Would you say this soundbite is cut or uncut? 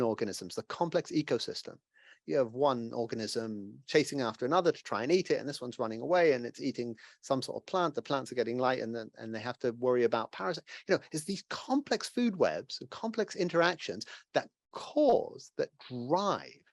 uncut